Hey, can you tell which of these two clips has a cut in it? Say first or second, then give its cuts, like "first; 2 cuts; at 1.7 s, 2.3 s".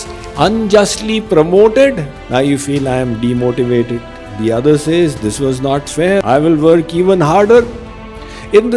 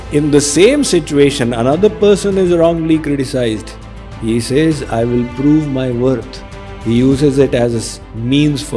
first; 1 cut; at 6.2 s